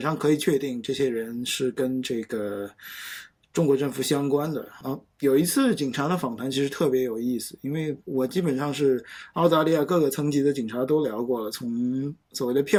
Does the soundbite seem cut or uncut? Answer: uncut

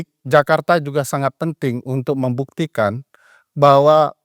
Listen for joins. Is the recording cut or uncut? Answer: uncut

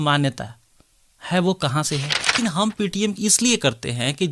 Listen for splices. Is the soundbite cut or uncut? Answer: cut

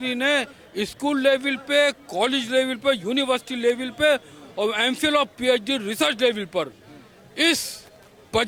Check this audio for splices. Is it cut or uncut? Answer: uncut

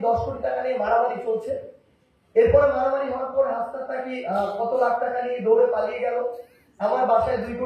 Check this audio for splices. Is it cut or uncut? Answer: uncut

